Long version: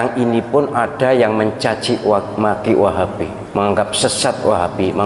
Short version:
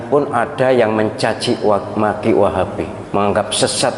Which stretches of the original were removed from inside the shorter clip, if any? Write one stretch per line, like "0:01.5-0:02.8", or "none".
none